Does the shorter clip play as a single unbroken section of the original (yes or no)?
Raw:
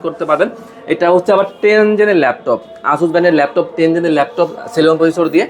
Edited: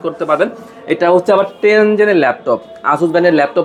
yes